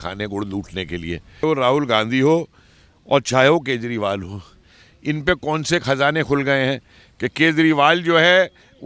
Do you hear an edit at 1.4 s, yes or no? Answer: yes